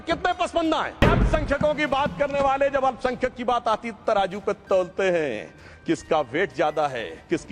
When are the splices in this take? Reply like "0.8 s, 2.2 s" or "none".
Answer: 0.9 s

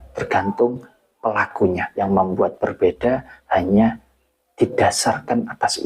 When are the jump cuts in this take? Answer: 1.9 s

